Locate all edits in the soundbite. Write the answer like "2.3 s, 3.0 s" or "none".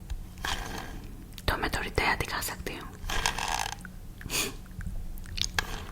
none